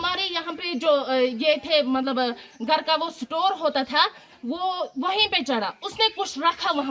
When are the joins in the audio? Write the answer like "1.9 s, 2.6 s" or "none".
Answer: none